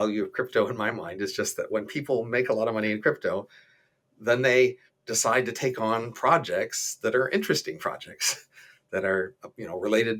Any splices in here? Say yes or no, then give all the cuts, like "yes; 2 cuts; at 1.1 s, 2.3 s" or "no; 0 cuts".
no; 0 cuts